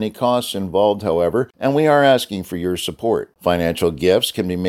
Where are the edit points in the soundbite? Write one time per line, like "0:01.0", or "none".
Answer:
0:01.5